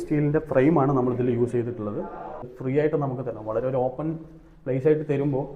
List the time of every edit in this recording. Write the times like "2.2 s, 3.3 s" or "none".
2.5 s